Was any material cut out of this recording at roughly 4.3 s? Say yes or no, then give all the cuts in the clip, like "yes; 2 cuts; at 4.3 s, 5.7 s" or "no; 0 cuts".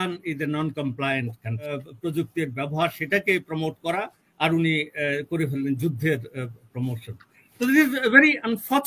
no; 1 cut; at 1.7 s